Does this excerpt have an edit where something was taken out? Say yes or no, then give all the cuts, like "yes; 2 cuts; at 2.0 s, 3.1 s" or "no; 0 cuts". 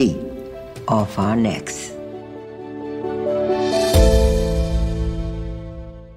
yes; 1 cut; at 1.6 s